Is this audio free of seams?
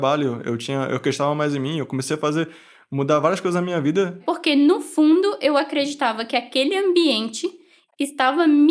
no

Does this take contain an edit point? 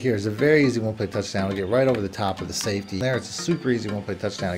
yes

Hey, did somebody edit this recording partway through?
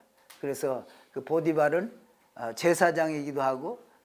no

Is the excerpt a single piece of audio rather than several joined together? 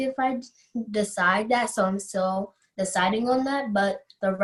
yes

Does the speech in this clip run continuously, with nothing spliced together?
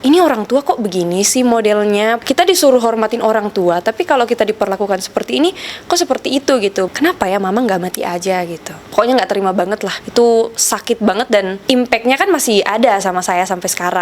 no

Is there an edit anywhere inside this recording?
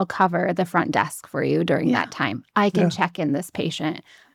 no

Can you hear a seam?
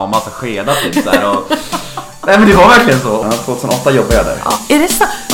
yes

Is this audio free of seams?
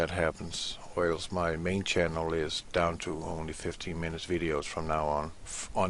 no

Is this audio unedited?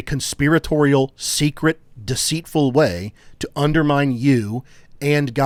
yes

